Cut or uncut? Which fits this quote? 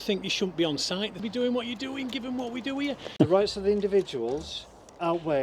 cut